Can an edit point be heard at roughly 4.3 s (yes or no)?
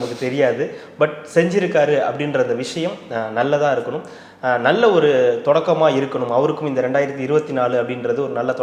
no